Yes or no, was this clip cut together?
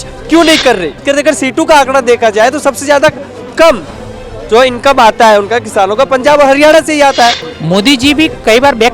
yes